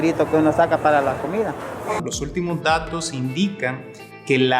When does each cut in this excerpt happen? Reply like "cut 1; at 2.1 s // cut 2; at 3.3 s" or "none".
cut 1; at 2.0 s